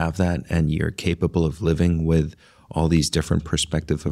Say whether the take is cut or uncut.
uncut